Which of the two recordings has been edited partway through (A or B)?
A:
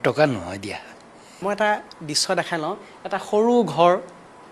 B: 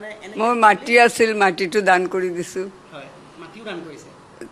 A